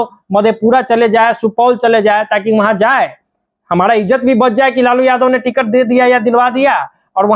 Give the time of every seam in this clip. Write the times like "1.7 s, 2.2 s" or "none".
none